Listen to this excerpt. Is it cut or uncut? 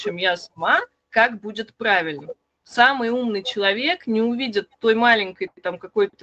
uncut